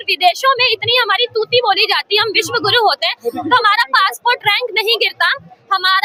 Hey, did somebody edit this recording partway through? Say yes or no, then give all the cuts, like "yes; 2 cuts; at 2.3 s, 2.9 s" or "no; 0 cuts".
no; 0 cuts